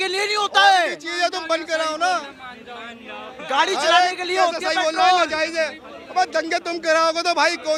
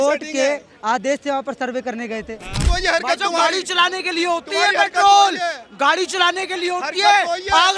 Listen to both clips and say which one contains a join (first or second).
second